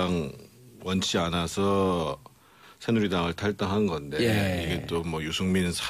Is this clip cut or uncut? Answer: uncut